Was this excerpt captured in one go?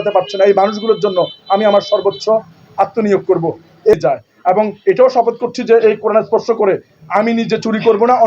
no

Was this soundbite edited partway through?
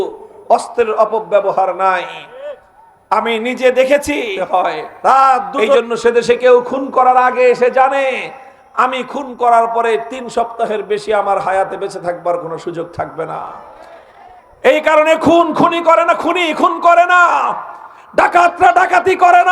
yes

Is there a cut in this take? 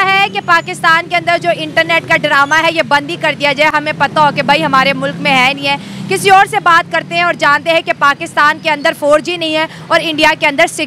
no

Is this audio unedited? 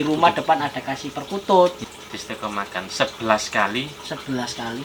no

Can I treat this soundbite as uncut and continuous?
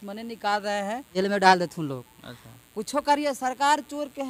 no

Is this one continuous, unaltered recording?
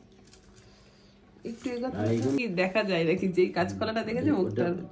no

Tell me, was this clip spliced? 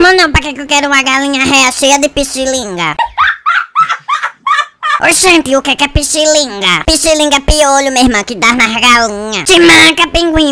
yes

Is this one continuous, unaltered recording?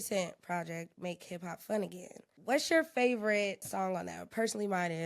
no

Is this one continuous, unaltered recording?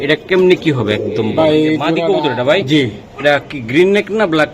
no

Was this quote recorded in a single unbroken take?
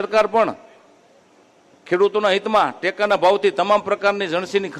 yes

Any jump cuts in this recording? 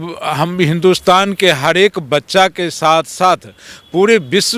no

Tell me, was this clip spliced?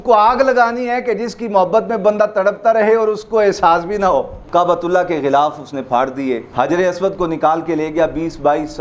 yes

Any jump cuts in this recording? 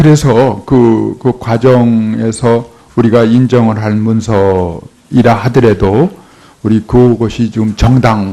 yes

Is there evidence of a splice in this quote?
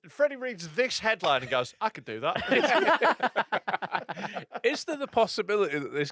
no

